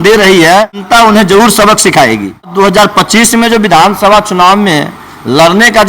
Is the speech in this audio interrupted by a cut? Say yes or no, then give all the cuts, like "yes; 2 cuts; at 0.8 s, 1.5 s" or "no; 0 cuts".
yes; 2 cuts; at 0.8 s, 2.5 s